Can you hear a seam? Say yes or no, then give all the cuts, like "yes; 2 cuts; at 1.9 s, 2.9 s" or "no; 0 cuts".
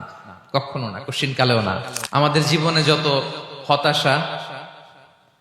yes; 1 cut; at 2.0 s